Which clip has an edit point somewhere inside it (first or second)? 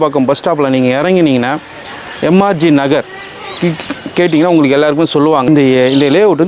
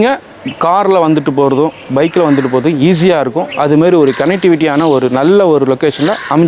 first